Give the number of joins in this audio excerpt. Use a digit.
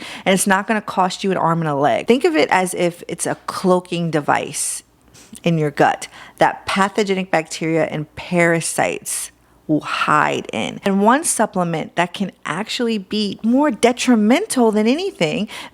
2